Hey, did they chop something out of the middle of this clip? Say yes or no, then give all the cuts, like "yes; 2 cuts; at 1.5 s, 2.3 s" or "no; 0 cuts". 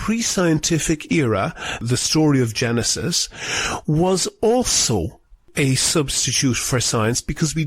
yes; 1 cut; at 1.8 s